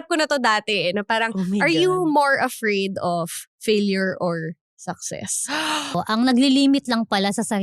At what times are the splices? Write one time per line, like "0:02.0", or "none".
0:05.9